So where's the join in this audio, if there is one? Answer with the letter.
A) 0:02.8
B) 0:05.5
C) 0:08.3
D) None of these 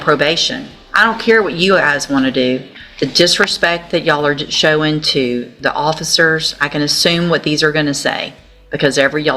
A